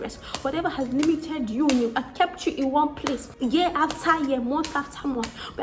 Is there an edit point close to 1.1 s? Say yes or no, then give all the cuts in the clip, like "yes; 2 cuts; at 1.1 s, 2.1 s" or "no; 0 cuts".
no; 1 cut; at 3.3 s